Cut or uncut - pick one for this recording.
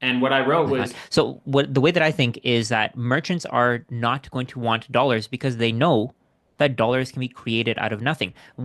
cut